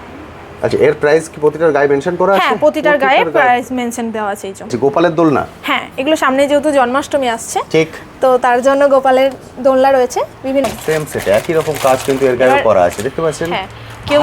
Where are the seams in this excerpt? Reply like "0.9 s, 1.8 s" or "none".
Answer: 4.7 s, 10.6 s